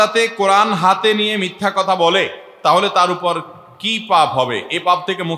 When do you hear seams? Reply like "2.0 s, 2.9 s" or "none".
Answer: none